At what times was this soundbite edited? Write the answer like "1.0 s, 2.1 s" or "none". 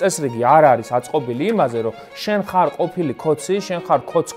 none